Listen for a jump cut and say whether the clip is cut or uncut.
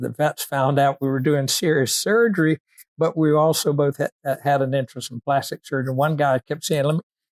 uncut